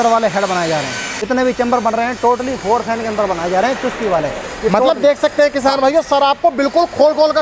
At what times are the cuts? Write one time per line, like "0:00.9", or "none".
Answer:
0:01.1